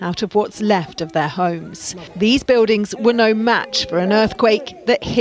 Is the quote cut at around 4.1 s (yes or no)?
no